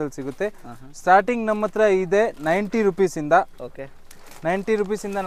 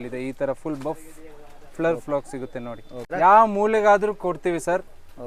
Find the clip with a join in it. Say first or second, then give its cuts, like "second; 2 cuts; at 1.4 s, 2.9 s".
second; 1 cut; at 3.1 s